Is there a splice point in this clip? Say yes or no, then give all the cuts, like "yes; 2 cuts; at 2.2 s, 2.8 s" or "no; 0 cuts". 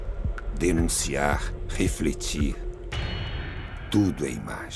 no; 0 cuts